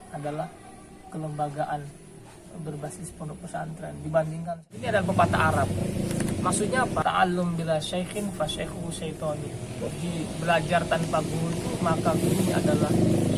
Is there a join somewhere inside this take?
yes; 2 cuts; at 4.8 s, 7.0 s

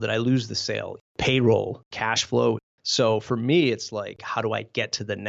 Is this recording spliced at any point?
yes; 4 cuts; at 1.0 s, 1.8 s, 2.7 s, 4.2 s

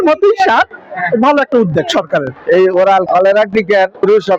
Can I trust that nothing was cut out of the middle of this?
yes; 0 cuts

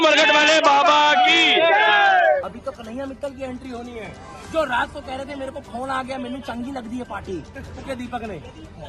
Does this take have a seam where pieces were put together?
yes; 2 cuts; at 2.5 s, 7.9 s

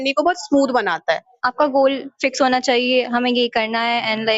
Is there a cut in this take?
yes; 1 cut; at 1.3 s

